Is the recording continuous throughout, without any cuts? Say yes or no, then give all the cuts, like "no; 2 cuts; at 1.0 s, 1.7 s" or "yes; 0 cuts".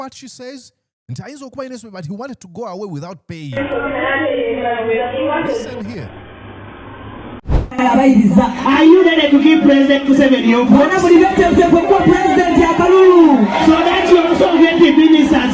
no; 1 cut; at 7.5 s